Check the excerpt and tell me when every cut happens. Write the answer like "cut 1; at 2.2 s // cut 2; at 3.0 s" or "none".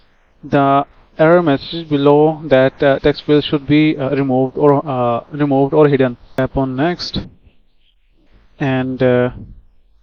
cut 1; at 6.4 s